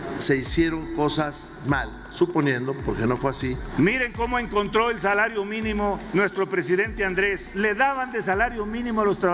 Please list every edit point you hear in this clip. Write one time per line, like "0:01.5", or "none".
0:03.6
0:06.0
0:07.5